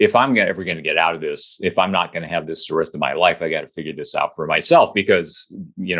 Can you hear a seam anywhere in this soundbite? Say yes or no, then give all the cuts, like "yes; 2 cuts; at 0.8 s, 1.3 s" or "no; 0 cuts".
no; 0 cuts